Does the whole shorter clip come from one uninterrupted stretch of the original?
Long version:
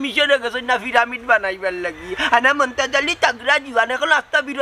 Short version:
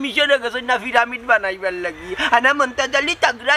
yes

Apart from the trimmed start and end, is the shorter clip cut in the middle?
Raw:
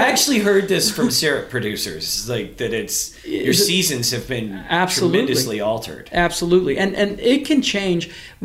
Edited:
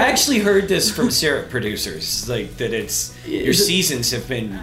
no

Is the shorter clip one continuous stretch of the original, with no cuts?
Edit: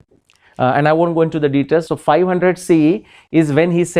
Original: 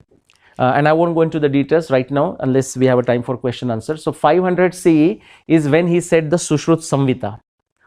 no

